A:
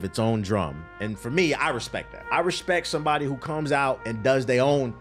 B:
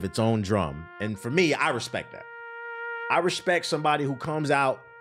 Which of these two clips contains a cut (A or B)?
A